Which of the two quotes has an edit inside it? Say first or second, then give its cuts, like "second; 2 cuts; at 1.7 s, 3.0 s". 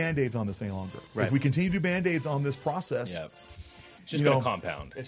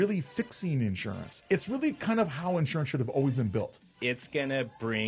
second; 2 cuts; at 1.3 s, 3.9 s